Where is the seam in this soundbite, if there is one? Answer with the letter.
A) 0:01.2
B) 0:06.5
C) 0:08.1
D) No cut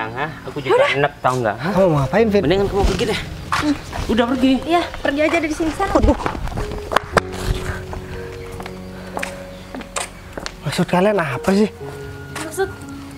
B